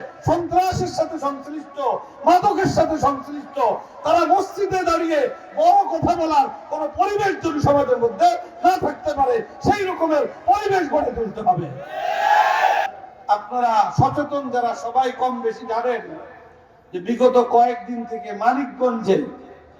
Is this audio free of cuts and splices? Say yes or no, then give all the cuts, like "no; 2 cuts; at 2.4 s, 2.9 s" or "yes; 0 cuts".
no; 1 cut; at 12.9 s